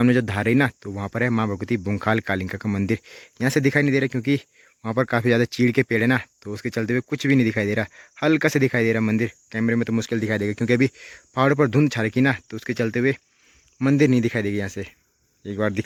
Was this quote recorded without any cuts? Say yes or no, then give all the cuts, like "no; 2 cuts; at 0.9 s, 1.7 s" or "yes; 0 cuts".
yes; 0 cuts